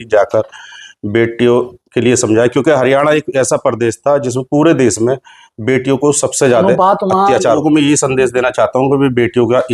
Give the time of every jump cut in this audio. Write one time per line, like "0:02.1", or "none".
0:07.6